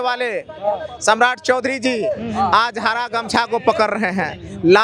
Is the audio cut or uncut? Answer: uncut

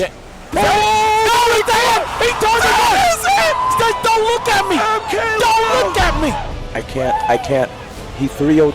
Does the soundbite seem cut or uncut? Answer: cut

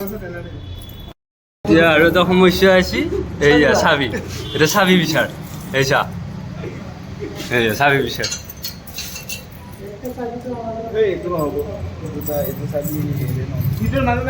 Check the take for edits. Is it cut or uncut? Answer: cut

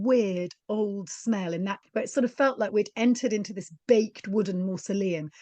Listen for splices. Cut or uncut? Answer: cut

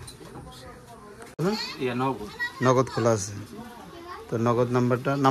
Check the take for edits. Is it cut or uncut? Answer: cut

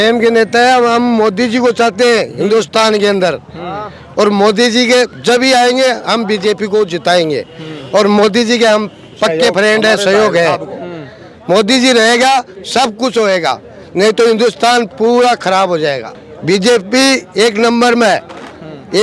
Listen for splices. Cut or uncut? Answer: uncut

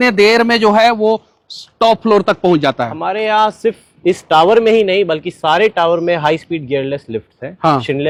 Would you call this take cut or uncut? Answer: uncut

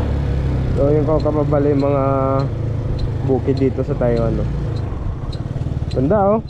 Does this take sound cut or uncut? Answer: uncut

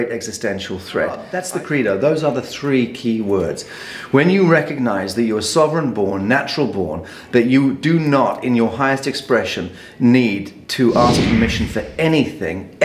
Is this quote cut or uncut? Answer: cut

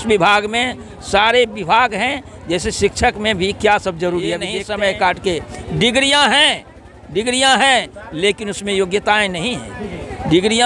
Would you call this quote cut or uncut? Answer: cut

